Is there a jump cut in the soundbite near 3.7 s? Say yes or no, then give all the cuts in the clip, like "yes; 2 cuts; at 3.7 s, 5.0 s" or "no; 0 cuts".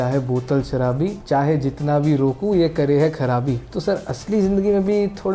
yes; 2 cuts; at 1.2 s, 3.7 s